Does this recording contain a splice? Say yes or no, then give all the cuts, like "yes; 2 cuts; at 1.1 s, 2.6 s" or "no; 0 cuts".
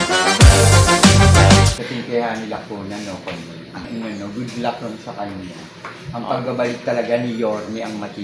yes; 2 cuts; at 1.8 s, 3.9 s